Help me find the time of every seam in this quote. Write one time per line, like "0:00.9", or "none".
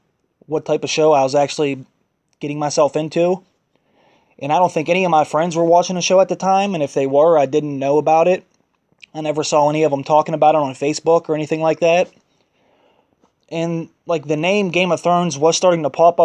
0:03.7